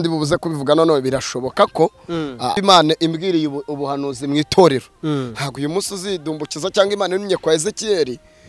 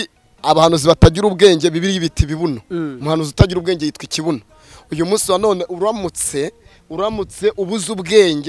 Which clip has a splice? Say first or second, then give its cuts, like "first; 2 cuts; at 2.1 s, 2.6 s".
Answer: first; 1 cut; at 2.6 s